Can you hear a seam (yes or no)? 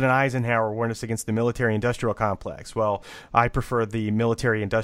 no